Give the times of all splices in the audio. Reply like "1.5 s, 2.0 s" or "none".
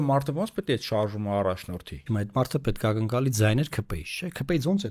2.0 s